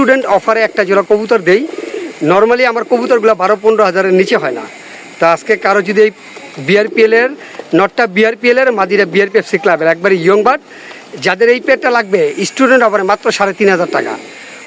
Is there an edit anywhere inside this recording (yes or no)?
no